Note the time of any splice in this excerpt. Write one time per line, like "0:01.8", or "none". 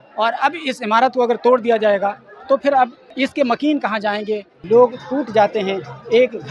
0:03.0
0:04.5